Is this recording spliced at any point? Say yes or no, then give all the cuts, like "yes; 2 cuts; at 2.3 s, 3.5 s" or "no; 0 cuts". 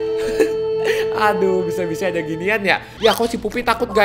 yes; 1 cut; at 2.9 s